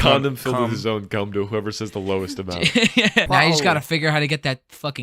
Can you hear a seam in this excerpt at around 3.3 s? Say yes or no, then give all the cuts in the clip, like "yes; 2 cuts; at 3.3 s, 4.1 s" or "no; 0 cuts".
yes; 1 cut; at 3.3 s